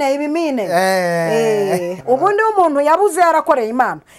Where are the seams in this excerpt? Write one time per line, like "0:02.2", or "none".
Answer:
0:01.9